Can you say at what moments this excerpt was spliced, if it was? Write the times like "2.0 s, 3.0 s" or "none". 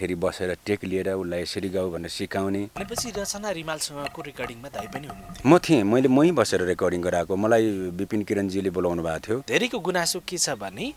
2.8 s, 9.4 s